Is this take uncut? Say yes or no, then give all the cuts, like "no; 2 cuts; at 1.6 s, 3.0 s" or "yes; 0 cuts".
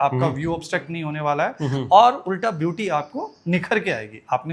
yes; 0 cuts